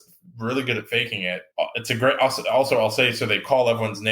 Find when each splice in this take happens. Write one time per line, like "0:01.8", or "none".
0:01.5